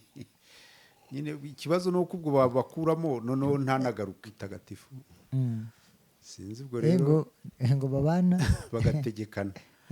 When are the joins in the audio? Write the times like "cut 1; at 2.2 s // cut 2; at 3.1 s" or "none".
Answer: cut 1; at 4.2 s